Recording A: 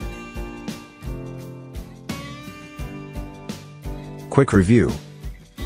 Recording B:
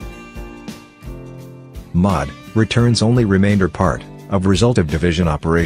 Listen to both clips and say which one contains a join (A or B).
B